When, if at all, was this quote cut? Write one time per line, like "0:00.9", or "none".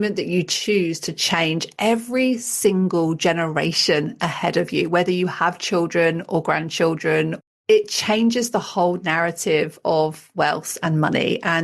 0:07.5
0:10.2